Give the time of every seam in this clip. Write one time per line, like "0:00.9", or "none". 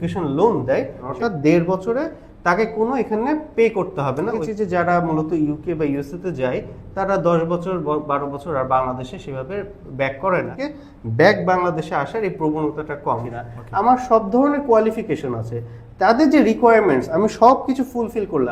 0:01.1
0:04.4
0:10.5
0:13.3